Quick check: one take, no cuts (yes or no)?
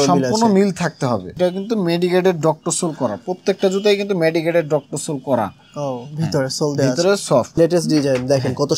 no